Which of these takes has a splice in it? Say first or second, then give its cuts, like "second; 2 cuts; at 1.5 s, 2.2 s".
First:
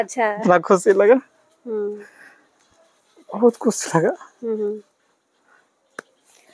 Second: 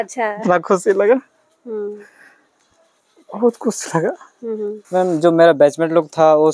second; 1 cut; at 4.8 s